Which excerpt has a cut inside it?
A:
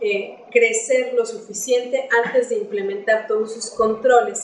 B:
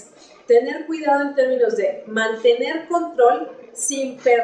B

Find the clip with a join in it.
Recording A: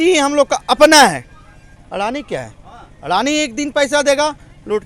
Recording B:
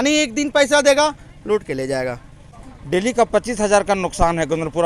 B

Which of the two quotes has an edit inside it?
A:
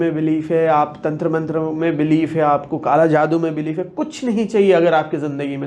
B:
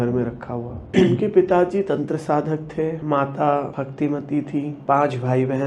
B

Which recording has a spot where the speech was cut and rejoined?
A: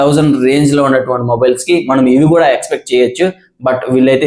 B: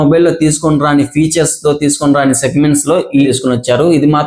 B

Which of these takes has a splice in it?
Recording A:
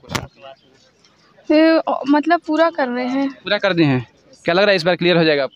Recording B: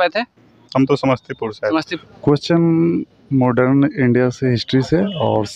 B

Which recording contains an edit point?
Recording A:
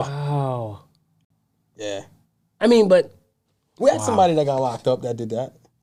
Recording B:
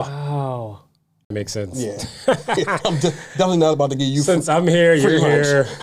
B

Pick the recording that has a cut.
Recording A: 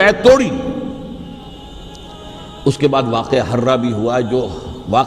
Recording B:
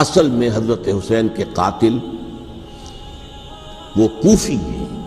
A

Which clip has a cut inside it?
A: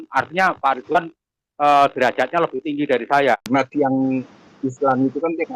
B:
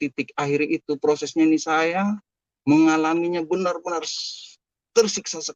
A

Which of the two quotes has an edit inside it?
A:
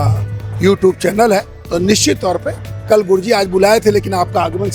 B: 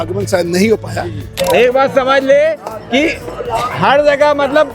B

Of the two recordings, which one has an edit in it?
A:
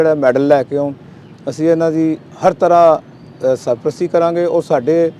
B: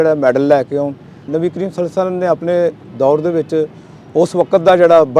B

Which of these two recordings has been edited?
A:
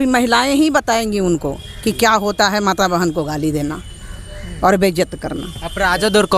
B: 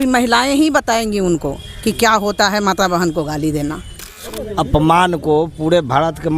B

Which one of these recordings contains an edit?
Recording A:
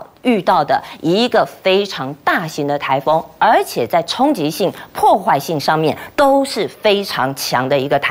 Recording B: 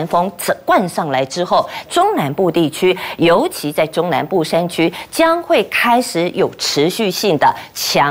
B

